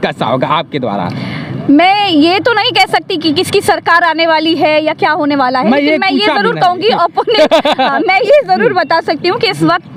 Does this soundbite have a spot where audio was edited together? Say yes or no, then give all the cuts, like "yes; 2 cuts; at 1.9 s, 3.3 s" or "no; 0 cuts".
no; 0 cuts